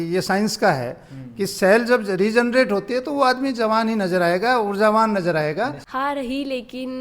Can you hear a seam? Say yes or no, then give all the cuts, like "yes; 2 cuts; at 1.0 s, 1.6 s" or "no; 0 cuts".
yes; 1 cut; at 5.8 s